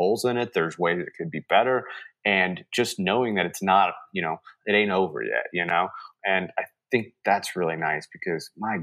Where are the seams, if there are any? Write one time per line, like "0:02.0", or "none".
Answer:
0:04.5
0:06.1